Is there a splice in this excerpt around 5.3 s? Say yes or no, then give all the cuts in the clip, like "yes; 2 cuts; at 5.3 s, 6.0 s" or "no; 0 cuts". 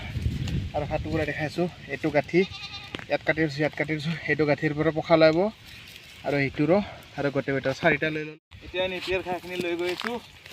no; 1 cut; at 8.2 s